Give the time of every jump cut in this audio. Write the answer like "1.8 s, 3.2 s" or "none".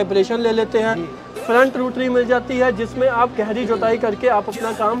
none